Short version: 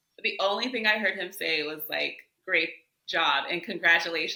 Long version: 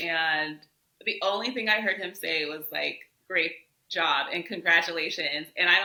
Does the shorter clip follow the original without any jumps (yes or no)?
yes